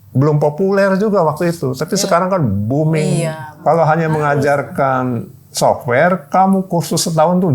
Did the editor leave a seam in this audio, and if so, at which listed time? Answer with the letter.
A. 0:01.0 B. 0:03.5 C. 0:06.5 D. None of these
B